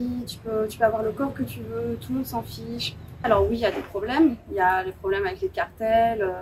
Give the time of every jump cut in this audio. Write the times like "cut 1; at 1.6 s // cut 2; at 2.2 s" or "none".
cut 1; at 3.2 s